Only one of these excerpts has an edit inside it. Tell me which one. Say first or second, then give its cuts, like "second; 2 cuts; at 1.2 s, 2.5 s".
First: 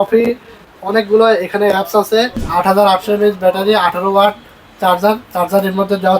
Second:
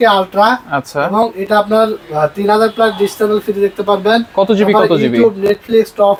first; 1 cut; at 2.4 s